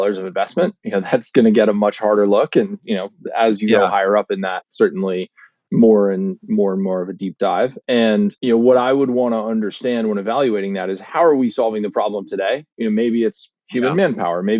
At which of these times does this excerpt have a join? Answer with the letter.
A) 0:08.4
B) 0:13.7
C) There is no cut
A